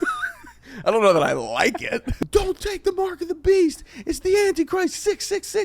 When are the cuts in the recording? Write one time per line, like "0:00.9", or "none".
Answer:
0:02.1